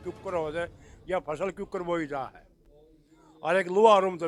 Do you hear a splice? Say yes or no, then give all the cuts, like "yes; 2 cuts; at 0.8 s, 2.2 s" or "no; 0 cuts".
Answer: no; 0 cuts